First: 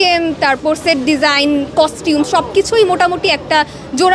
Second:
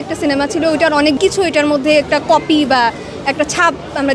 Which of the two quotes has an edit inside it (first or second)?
second